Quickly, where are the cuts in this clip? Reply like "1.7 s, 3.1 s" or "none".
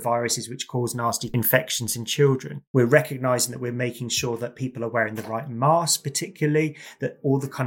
1.2 s, 2.5 s